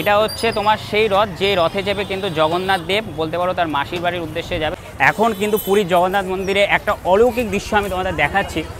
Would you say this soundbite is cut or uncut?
cut